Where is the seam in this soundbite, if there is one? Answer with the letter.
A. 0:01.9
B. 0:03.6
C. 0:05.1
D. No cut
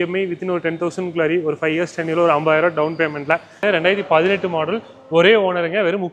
B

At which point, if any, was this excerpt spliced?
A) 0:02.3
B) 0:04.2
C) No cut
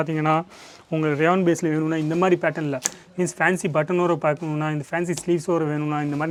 C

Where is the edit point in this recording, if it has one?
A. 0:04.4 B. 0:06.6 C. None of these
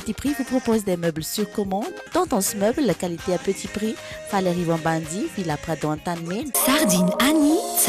B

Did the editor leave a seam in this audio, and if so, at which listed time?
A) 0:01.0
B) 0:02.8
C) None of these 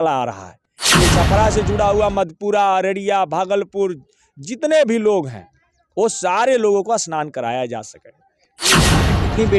A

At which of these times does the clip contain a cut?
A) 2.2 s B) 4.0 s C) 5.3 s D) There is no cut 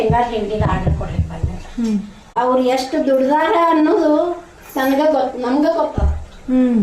A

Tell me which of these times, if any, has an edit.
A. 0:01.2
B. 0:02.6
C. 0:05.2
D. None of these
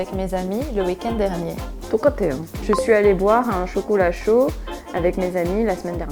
B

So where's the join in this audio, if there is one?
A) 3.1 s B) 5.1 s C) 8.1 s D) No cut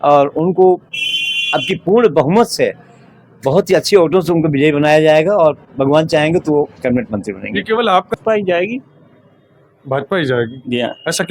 C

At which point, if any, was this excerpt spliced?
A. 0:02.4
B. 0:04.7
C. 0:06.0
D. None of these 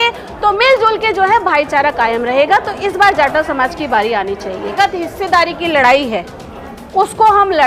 B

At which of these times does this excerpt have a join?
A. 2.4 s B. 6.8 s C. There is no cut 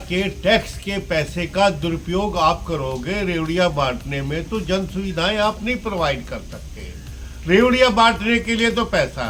C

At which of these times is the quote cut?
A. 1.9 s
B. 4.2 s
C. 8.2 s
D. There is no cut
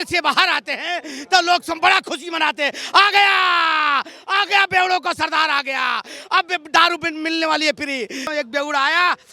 C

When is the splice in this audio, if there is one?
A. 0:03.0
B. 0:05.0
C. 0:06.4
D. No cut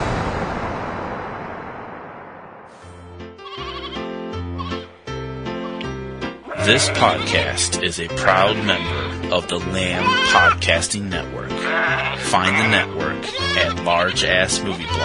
A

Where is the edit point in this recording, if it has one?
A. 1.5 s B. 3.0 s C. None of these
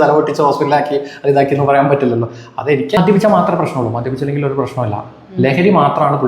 B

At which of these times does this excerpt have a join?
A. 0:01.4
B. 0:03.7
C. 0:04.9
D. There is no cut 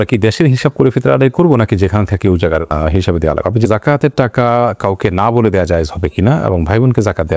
B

